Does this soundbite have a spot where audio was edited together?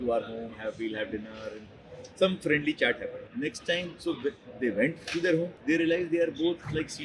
no; 0 cuts

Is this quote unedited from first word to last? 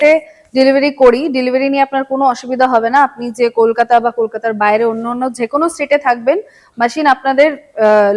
yes; 0 cuts

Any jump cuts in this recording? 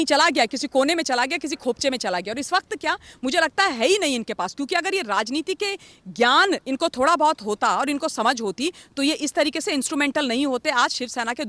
no; 0 cuts

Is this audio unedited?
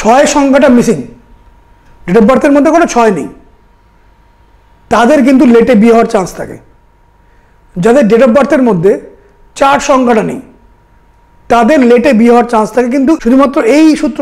yes; 0 cuts

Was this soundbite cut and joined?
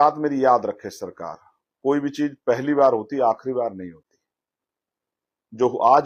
no; 0 cuts

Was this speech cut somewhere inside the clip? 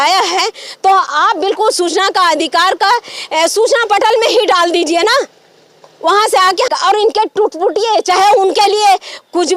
yes; 1 cut; at 6.7 s

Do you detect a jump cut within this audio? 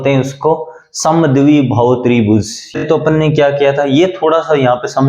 yes; 1 cut; at 2.8 s

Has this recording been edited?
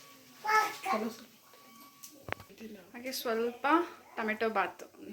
no; 0 cuts

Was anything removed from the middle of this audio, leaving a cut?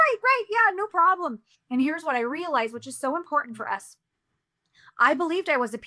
yes; 1 cut; at 1.4 s

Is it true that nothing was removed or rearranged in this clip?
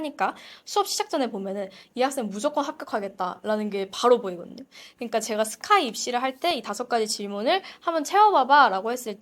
yes; 0 cuts

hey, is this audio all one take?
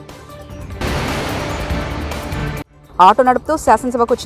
yes; 0 cuts

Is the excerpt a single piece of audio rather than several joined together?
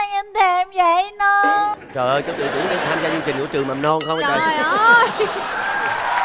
yes; 0 cuts

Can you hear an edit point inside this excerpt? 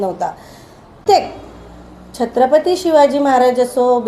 yes; 1 cut; at 1.0 s

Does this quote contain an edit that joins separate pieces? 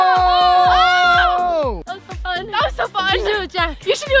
no; 0 cuts

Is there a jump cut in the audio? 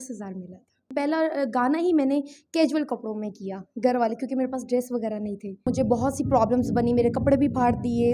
yes; 2 cuts; at 0.9 s, 5.7 s

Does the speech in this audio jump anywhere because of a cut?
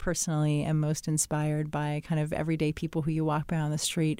no; 0 cuts

